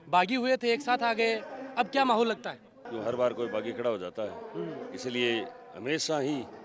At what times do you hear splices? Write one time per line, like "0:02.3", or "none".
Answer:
0:02.8